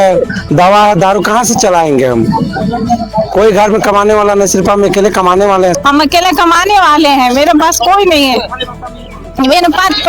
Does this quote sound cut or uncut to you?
cut